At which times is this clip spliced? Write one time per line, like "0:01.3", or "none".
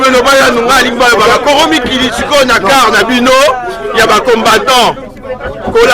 none